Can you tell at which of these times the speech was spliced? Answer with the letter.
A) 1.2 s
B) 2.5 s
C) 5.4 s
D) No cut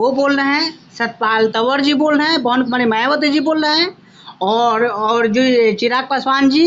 D